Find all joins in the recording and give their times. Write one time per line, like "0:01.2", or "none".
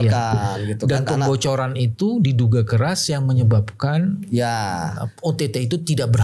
none